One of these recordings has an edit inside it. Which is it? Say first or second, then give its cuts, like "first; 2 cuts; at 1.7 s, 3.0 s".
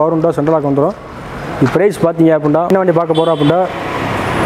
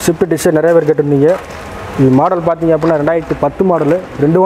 first; 1 cut; at 2.7 s